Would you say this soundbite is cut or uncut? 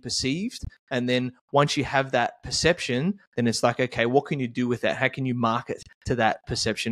uncut